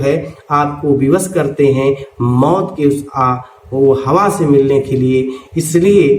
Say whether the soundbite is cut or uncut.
uncut